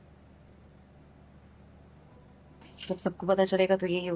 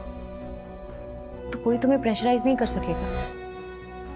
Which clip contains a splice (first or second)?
second